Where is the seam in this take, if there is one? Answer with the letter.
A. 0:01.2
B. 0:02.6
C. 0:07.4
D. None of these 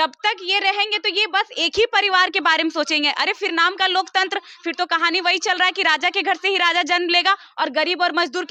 D